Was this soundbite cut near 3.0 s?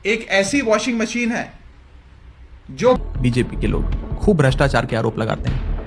yes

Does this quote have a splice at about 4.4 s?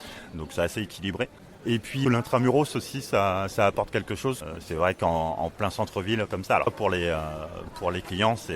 yes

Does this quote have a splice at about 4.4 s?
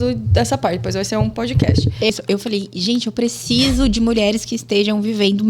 no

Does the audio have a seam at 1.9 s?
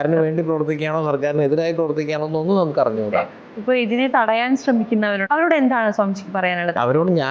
no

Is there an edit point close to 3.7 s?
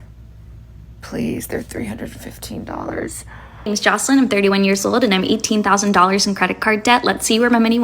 yes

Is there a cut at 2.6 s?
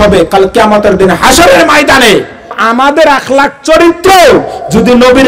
yes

